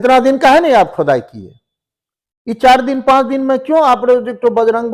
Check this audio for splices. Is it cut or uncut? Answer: uncut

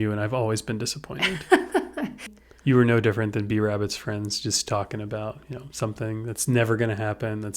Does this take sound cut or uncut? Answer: cut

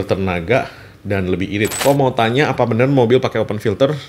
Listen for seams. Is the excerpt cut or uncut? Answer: cut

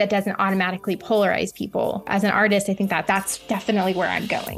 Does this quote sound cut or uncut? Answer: cut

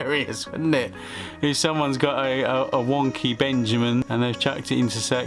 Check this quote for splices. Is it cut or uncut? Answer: cut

